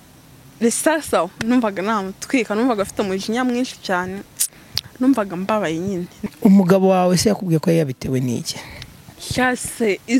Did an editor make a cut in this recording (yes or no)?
yes